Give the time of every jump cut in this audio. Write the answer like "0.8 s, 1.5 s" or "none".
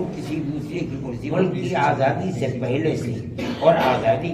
1.3 s